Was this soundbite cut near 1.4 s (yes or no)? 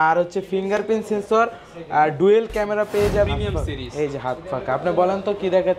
no